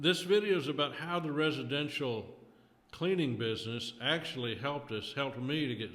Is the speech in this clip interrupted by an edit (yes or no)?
no